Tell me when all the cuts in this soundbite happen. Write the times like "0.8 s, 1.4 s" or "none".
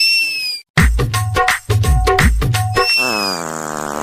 3.0 s